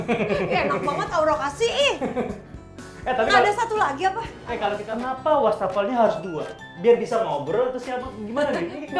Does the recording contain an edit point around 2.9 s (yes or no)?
no